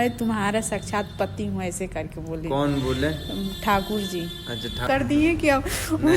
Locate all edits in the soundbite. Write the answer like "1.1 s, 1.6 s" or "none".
4.8 s